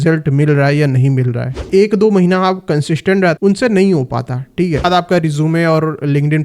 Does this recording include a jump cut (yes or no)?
yes